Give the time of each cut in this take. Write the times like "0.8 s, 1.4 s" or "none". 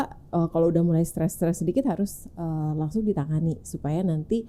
none